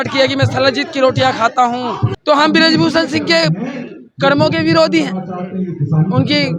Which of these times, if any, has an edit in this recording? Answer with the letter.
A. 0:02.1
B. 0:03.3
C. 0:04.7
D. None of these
A